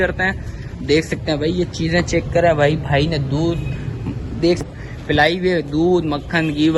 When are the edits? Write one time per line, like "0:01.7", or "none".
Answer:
0:04.6